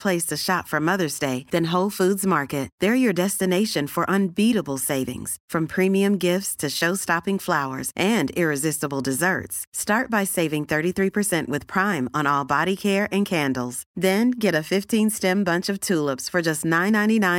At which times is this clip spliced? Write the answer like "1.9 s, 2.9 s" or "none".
none